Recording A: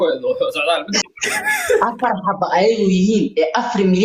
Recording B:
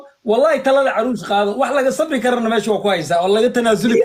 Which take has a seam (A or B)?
A